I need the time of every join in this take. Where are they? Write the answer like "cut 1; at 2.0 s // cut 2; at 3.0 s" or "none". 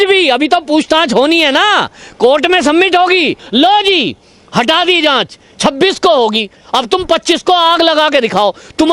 cut 1; at 3.4 s